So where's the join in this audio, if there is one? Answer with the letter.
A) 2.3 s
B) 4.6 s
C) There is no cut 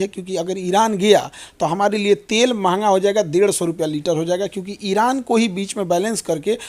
C